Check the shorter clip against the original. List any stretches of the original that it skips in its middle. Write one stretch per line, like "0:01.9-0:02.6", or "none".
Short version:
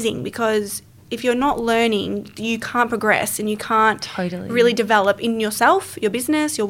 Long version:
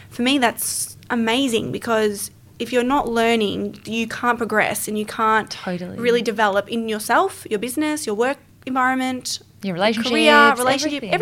none